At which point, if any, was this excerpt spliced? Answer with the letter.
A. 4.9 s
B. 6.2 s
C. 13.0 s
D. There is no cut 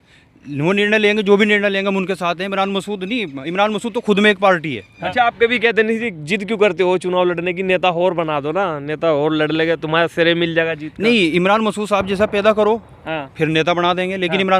A